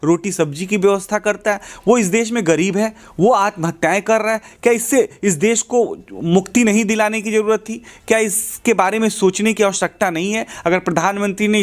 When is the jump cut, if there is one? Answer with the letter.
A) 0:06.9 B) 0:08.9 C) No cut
C